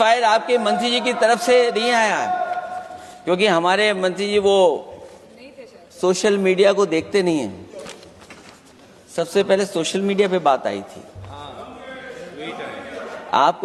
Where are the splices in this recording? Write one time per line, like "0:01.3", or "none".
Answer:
none